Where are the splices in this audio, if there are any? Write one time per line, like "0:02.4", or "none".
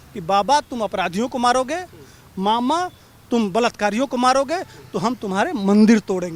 none